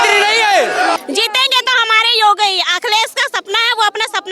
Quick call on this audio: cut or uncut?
cut